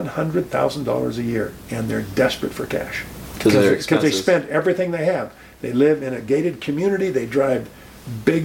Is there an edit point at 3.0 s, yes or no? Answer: no